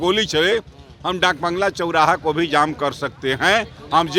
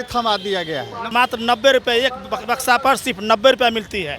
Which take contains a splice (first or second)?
second